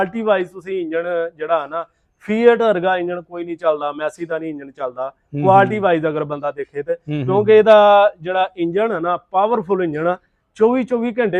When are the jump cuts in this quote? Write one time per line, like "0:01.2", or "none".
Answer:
none